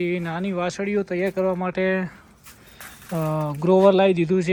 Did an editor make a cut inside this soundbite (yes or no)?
no